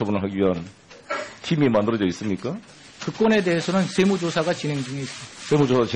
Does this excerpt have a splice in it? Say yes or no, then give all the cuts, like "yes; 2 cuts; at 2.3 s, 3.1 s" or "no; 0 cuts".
yes; 1 cut; at 1.6 s